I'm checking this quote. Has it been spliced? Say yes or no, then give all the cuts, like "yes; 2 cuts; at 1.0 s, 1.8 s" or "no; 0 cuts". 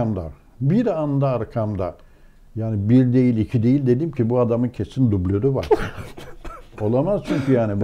no; 0 cuts